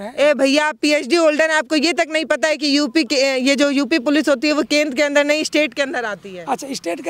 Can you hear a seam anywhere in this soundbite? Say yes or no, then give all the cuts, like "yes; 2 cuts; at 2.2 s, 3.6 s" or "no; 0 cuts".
no; 0 cuts